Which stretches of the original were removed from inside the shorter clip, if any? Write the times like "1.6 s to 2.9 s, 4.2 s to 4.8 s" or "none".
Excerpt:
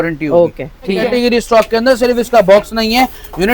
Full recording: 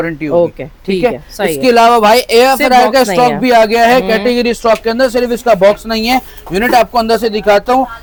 1.0 s to 4.2 s